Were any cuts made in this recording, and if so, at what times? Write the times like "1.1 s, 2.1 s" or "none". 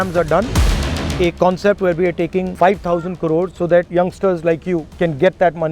0.9 s, 2.5 s, 3.7 s, 4.9 s